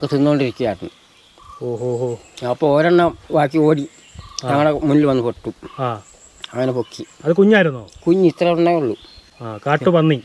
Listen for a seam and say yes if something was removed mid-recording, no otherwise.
no